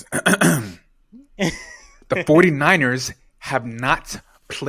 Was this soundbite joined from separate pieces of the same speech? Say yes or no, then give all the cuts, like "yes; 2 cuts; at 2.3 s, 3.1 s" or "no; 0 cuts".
no; 0 cuts